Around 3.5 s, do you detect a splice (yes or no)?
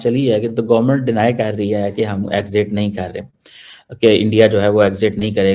no